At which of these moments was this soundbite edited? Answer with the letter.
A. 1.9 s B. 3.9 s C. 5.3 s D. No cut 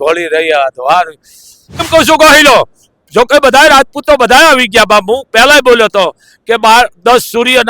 A